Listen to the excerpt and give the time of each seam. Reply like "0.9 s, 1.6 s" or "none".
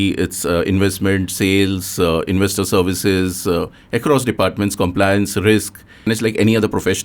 6.1 s